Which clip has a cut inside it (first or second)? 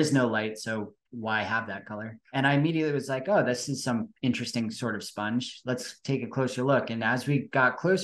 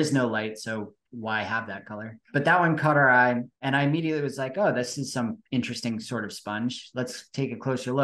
first